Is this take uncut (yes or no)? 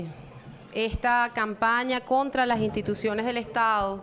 yes